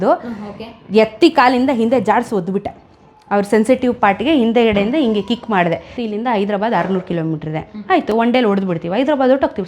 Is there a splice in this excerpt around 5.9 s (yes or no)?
yes